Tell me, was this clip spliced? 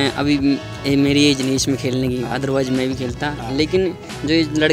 no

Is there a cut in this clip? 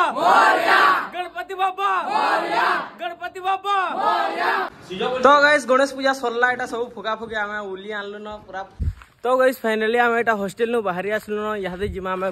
yes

